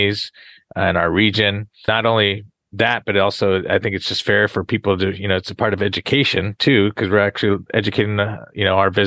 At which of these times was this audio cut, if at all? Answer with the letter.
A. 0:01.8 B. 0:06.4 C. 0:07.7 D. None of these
A